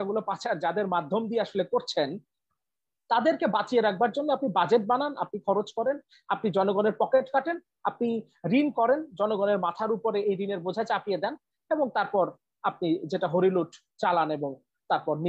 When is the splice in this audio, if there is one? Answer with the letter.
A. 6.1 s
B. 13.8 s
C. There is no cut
C